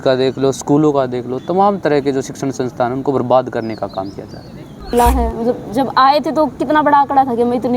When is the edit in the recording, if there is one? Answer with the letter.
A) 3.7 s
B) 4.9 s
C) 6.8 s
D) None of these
B